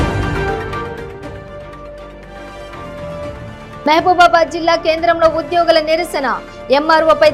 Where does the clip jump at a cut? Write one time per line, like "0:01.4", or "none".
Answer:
0:02.9